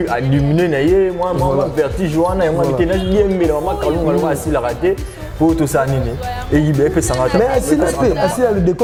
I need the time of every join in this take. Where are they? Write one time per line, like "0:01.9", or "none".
none